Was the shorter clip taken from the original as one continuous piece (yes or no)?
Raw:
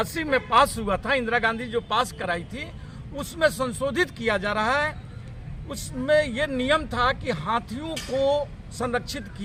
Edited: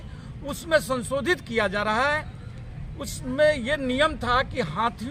yes